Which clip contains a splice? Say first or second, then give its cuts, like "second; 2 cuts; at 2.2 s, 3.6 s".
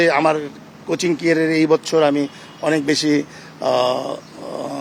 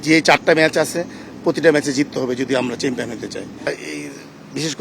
second; 1 cut; at 3.8 s